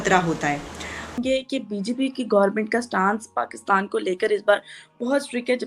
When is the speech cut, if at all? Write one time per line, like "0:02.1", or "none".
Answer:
0:01.2

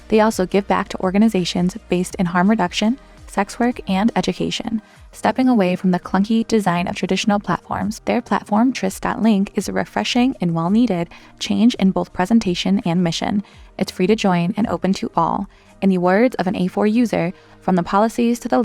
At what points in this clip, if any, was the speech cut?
none

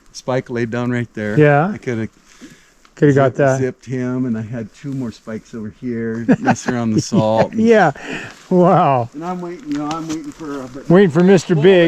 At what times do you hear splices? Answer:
none

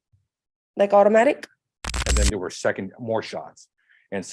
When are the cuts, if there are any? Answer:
0:02.0

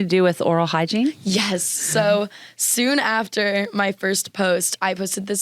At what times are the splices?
none

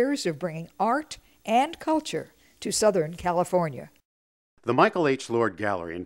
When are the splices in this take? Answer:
none

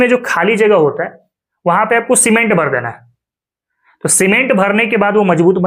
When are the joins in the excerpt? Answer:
none

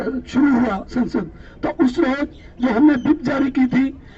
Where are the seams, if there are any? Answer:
none

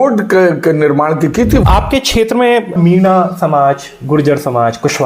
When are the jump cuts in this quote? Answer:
0:01.6
0:02.7

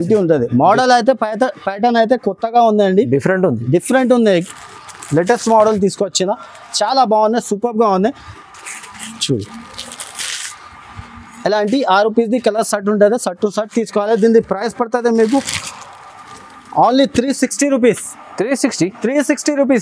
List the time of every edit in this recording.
none

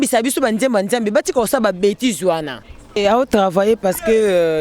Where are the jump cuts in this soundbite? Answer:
0:03.0

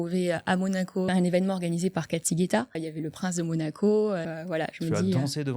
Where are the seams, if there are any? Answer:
0:01.1
0:02.9
0:04.3

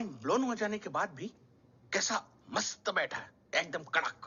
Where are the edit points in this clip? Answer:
none

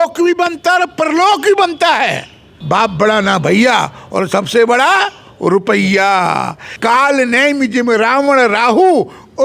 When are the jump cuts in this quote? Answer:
0:02.5
0:06.6

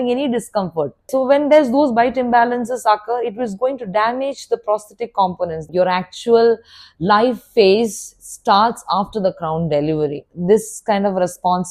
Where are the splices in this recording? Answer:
0:01.1
0:05.7
0:10.3

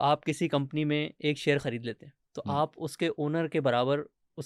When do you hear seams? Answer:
none

